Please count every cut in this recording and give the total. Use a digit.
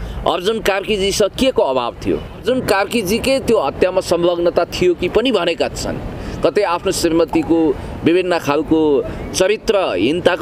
1